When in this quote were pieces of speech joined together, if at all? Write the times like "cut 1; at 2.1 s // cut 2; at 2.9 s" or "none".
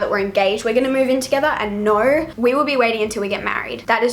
none